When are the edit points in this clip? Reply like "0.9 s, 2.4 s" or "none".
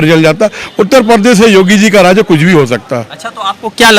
none